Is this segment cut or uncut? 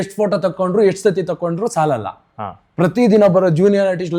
uncut